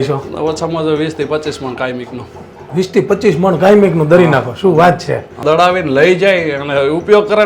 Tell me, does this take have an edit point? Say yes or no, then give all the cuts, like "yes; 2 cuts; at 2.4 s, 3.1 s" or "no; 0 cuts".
yes; 1 cut; at 5.3 s